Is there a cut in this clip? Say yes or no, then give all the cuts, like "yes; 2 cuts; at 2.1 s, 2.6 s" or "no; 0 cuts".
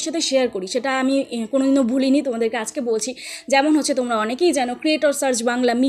no; 0 cuts